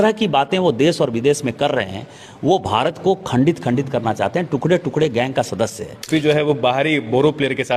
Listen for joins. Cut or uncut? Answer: cut